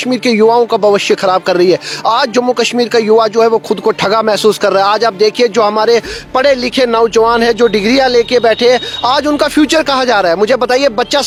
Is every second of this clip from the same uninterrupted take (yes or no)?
yes